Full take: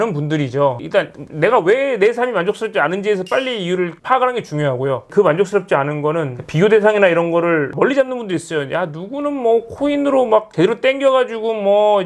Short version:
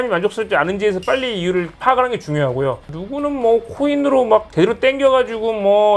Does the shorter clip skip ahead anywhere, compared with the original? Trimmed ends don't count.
yes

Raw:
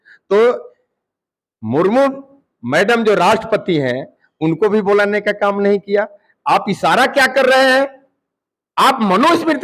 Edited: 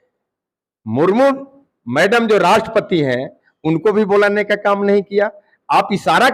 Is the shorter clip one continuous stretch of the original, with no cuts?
yes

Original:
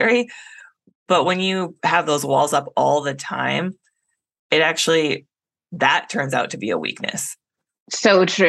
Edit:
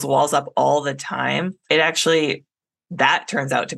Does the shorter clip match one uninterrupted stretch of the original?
no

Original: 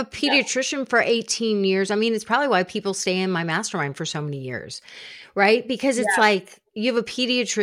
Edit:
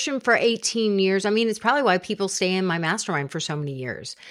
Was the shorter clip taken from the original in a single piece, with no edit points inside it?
yes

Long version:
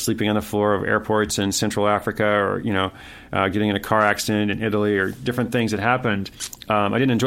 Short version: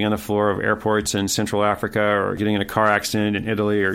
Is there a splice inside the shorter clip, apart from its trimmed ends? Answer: yes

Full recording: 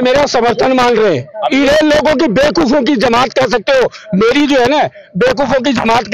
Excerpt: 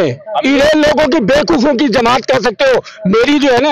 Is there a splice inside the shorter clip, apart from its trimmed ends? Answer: no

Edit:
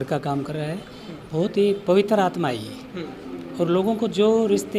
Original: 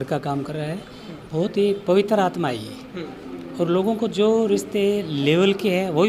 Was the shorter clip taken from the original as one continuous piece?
yes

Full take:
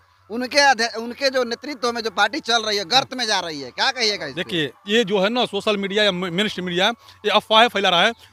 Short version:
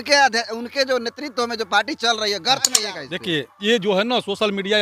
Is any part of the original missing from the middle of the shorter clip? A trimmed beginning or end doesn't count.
yes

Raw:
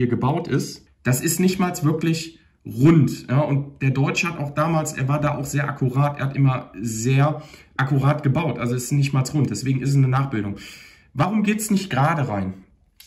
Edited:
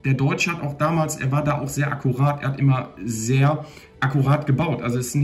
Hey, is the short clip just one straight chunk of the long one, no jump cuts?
yes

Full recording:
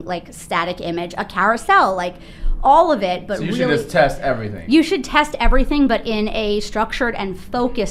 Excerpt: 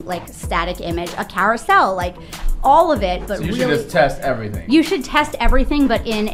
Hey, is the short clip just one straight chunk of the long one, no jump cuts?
yes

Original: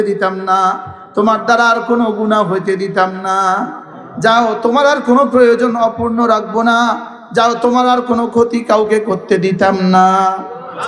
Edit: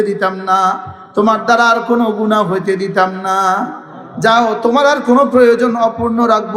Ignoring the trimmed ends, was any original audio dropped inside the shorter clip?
no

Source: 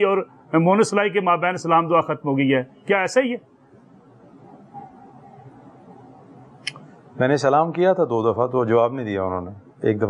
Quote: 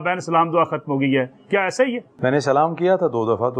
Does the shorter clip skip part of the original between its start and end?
yes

